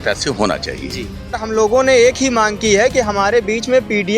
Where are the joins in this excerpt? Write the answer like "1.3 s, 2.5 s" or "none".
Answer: 1.4 s

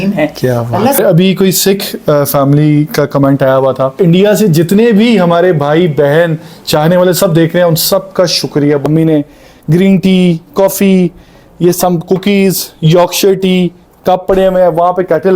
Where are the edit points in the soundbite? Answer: 1.0 s, 4.0 s, 8.8 s

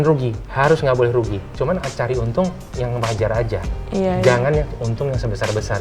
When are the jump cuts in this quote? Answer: none

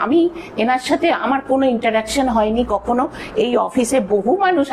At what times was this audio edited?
none

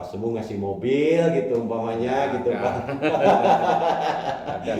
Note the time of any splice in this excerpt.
none

